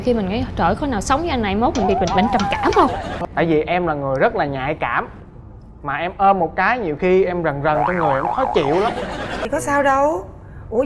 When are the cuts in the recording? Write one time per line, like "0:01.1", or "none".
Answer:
0:03.1
0:09.4